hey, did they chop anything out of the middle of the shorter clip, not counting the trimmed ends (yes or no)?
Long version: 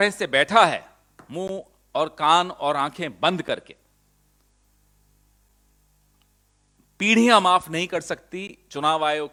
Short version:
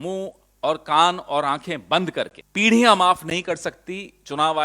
yes